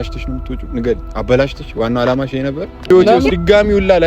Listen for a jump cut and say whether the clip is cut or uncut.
cut